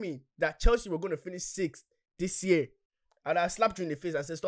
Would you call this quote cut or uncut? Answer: uncut